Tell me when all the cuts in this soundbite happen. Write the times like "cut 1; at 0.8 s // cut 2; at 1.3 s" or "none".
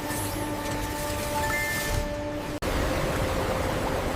cut 1; at 2.6 s